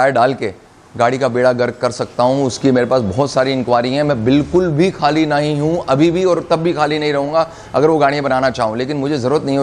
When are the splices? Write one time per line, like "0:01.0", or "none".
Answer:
none